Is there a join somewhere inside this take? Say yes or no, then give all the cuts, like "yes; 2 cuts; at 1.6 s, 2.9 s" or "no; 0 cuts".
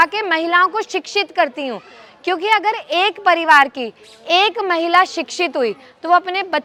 no; 0 cuts